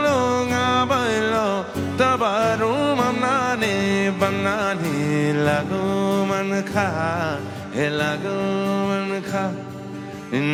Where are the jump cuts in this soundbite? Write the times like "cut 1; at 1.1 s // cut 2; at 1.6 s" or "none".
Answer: none

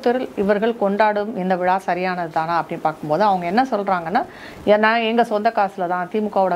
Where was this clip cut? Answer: none

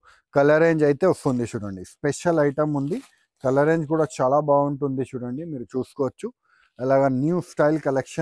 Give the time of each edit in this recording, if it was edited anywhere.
none

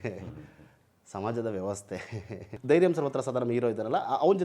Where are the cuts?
cut 1; at 2.6 s

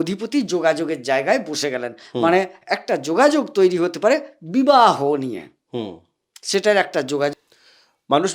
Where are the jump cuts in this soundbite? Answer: cut 1; at 7.3 s

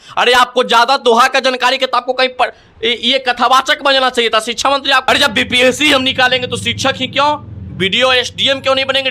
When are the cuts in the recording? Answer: cut 1; at 5.1 s

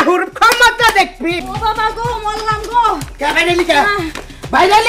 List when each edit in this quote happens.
cut 1; at 1.4 s

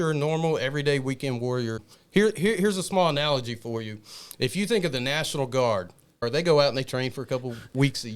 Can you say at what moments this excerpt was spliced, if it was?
cut 1; at 1.9 s // cut 2; at 6.2 s

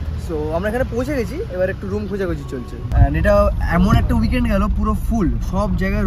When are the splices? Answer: none

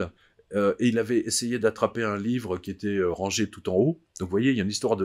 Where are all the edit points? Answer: none

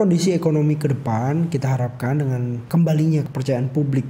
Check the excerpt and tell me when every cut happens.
cut 1; at 2.6 s // cut 2; at 3.3 s

